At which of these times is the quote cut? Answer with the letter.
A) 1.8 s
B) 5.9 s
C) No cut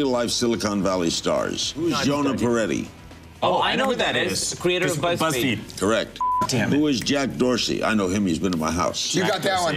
A